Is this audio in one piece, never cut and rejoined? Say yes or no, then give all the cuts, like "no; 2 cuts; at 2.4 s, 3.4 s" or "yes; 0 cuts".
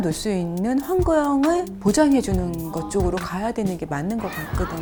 yes; 0 cuts